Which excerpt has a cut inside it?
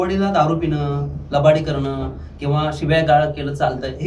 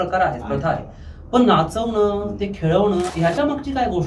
second; 1 cut; at 3.1 s

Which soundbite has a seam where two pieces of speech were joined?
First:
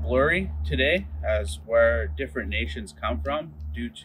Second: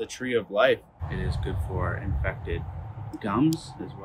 second; 1 cut; at 1.0 s

